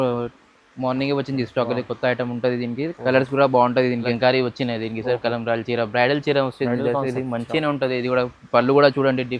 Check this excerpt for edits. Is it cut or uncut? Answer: cut